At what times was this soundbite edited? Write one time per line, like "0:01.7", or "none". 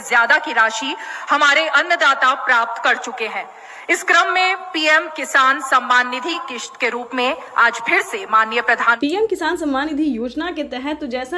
0:09.4